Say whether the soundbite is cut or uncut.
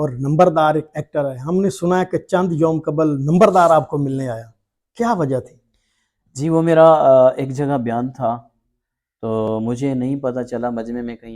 uncut